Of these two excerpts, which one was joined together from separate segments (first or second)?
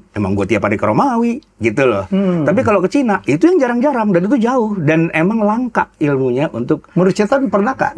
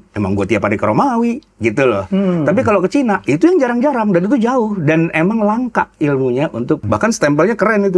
second